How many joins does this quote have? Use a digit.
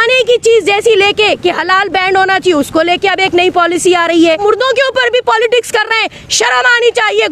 1